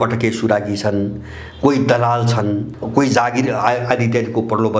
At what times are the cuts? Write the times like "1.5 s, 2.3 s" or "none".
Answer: 2.7 s